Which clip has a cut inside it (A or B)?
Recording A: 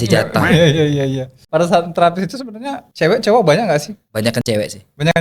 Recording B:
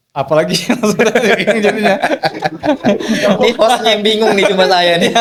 A